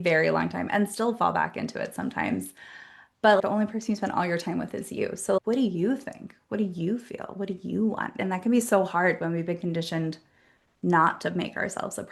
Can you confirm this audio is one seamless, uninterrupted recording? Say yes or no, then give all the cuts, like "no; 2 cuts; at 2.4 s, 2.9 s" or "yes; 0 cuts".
no; 1 cut; at 3.5 s